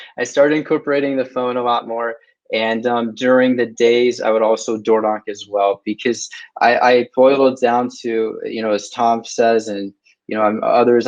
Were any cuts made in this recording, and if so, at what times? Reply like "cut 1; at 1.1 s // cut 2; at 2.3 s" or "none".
none